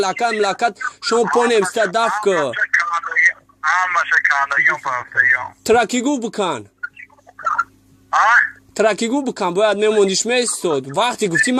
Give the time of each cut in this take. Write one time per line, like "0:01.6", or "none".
none